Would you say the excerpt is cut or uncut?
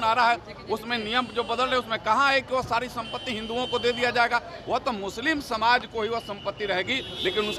uncut